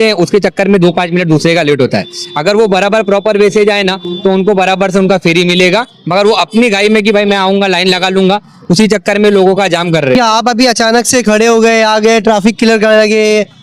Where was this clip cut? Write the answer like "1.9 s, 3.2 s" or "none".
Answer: 10.1 s